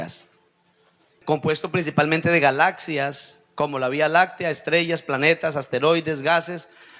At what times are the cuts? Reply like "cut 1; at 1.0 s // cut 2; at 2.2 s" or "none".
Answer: cut 1; at 1.2 s